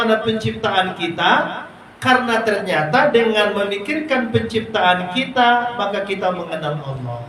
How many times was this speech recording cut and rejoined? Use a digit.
0